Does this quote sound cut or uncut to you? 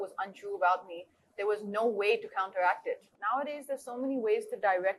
cut